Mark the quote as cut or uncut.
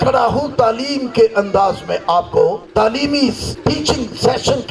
cut